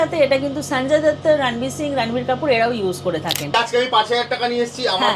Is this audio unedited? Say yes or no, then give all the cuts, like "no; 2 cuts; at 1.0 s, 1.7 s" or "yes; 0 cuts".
no; 1 cut; at 3.5 s